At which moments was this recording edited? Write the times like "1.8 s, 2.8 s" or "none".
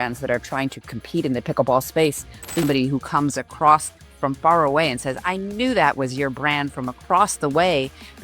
2.6 s